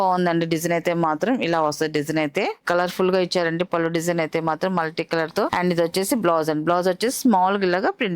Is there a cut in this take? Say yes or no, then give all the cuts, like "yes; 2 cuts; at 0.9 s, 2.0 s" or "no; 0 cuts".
yes; 2 cuts; at 2.6 s, 5.5 s